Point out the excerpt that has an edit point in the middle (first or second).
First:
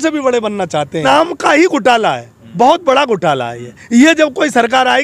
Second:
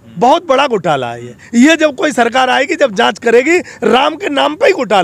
first